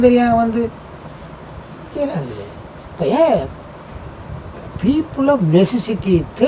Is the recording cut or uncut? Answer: uncut